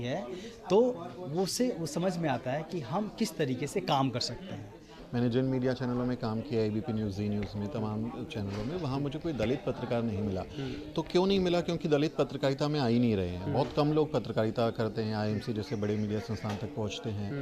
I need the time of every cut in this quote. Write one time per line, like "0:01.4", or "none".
0:05.0